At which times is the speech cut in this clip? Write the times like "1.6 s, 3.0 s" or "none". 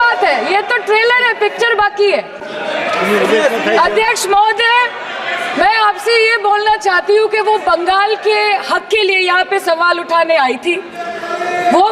none